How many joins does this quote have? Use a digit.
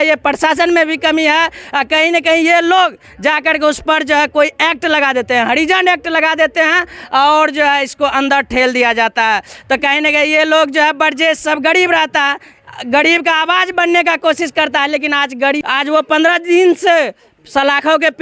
0